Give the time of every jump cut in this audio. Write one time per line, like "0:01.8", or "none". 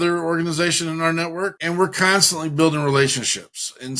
0:01.6